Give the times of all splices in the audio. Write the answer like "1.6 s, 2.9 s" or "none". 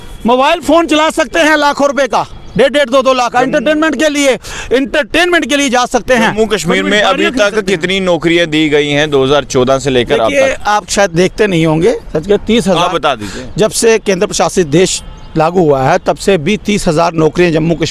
none